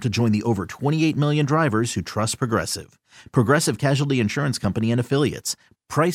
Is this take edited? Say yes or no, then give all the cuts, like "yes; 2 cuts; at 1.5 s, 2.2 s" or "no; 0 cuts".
no; 0 cuts